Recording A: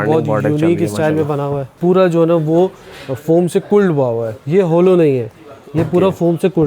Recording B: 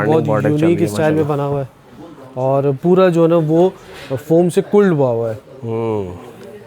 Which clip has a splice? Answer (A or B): A